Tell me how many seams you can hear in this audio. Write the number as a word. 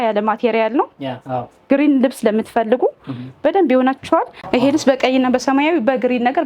one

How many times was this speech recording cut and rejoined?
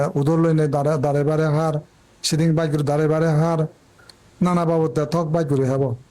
one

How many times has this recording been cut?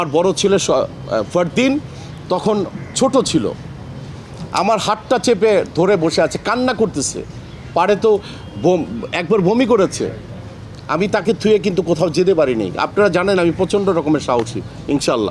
zero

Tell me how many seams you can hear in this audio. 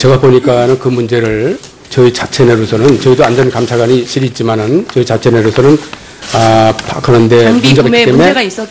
one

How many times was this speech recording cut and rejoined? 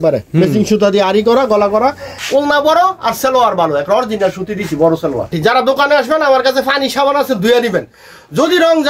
two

